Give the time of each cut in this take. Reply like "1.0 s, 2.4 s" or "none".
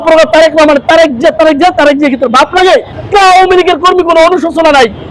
3.0 s